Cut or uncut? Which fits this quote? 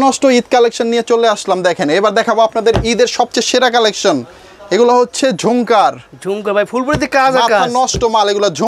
uncut